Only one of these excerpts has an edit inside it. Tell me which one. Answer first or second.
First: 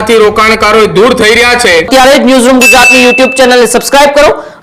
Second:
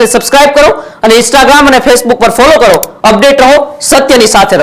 first